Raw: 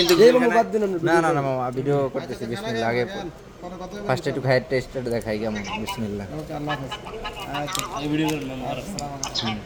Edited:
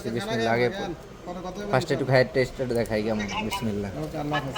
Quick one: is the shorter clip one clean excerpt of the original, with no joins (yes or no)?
yes